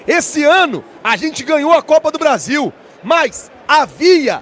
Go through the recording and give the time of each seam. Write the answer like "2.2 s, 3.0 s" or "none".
none